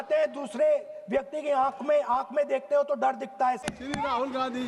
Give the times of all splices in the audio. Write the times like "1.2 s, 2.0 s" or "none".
3.6 s